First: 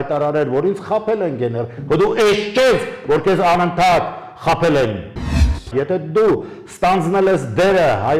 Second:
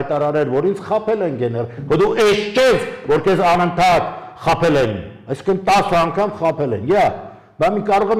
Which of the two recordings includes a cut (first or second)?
first